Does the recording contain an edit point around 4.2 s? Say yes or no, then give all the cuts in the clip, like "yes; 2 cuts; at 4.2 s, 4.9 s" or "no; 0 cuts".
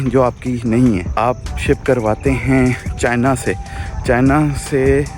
no; 2 cuts; at 1.1 s, 2.9 s